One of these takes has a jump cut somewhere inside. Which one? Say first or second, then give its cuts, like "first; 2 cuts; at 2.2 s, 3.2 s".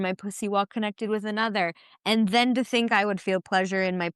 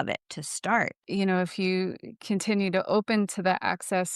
second; 1 cut; at 1.1 s